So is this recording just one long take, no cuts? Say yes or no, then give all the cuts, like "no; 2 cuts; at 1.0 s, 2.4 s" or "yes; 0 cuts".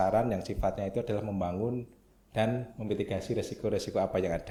yes; 0 cuts